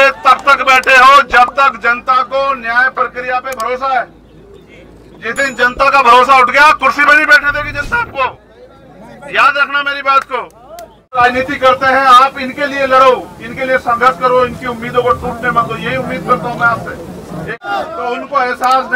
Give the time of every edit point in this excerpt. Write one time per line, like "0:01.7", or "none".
0:11.2
0:17.6

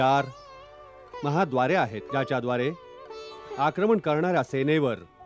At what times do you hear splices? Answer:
0:02.0

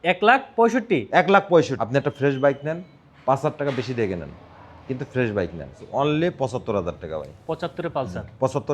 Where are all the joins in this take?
0:01.8
0:06.1

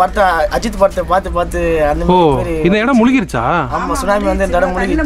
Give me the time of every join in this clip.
none

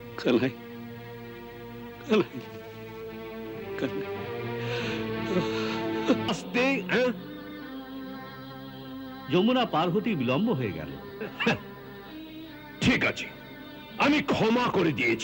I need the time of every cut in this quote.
0:06.3

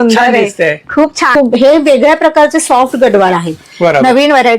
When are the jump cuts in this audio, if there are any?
0:01.2

